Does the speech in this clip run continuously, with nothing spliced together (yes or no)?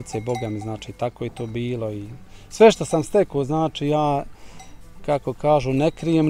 yes